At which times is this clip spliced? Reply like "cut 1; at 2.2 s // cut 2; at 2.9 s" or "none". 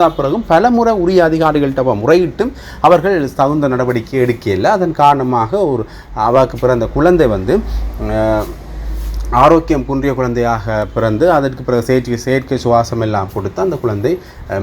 none